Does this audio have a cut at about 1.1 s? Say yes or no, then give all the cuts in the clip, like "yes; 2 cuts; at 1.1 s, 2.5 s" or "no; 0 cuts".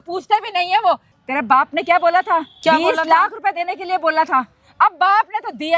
yes; 2 cuts; at 1.1 s, 2.5 s